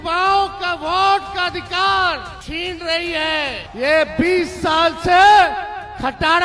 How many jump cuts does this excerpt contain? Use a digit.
2